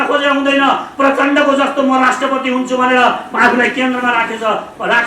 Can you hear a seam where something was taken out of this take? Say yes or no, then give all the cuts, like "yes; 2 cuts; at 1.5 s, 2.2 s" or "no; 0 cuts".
no; 0 cuts